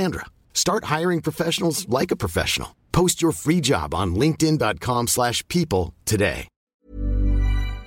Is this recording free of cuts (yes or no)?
no